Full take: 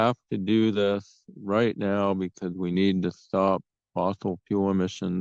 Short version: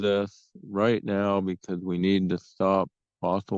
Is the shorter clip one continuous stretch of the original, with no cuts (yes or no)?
yes